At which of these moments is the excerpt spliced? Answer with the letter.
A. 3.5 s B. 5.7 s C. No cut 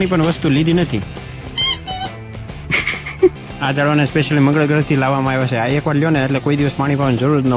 A